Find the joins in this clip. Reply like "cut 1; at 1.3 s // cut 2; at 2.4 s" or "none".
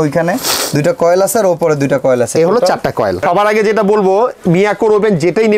cut 1; at 3.2 s

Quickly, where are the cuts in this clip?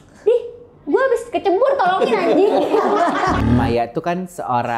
cut 1; at 3.4 s

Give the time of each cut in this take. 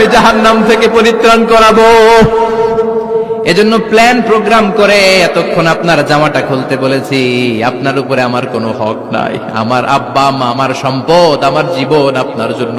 none

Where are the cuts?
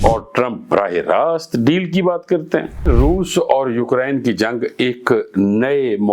cut 1; at 2.8 s

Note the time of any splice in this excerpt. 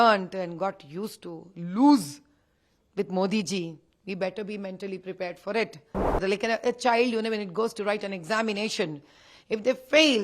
cut 1; at 6.2 s

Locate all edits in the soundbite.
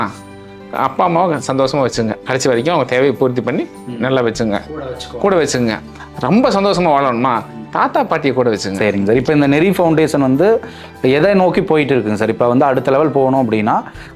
cut 1; at 8.8 s

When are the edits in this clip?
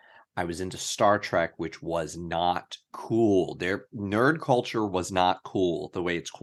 none

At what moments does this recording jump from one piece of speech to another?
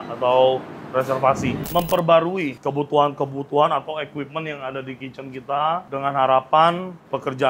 cut 1; at 1.7 s

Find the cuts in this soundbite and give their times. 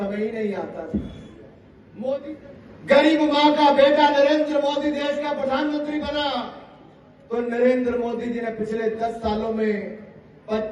cut 1; at 2.4 s

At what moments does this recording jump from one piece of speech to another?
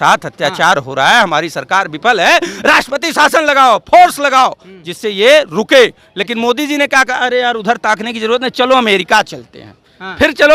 none

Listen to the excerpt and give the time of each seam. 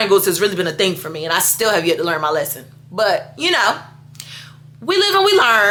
none

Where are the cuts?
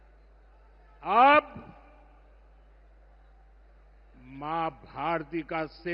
none

